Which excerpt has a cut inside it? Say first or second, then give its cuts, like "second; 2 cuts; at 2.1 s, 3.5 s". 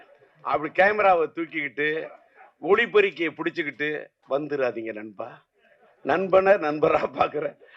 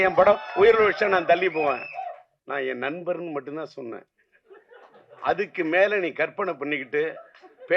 second; 1 cut; at 2.3 s